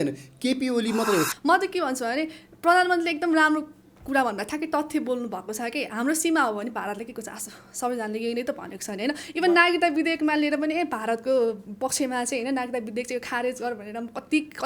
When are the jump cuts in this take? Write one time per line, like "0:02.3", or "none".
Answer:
0:01.3